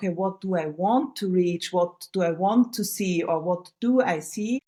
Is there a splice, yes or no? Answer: no